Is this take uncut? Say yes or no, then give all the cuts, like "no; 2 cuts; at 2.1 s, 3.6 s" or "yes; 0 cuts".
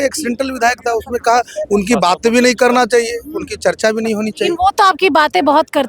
yes; 0 cuts